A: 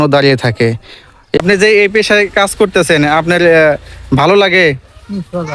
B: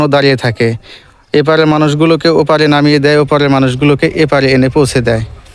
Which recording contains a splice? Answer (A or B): A